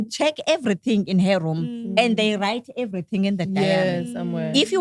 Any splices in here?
no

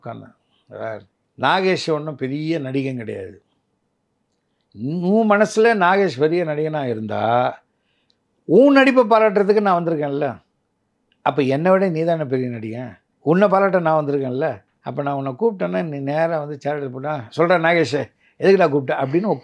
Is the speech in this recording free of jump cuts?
yes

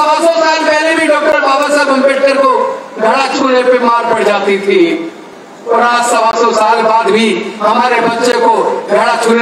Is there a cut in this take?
no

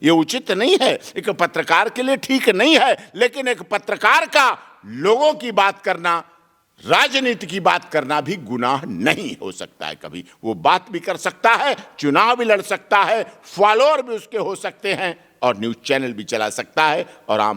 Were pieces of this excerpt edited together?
no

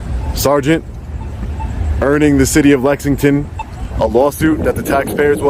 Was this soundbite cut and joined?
no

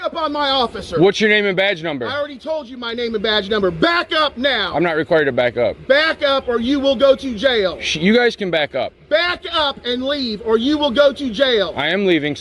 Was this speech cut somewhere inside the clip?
no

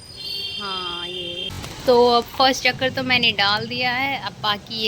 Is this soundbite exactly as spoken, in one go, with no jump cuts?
no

